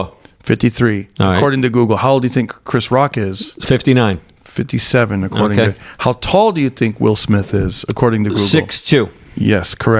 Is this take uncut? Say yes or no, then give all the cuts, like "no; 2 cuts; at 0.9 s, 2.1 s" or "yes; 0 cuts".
yes; 0 cuts